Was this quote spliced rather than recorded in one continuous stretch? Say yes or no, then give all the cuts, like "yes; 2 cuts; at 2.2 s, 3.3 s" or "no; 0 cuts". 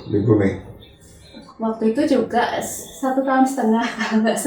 no; 0 cuts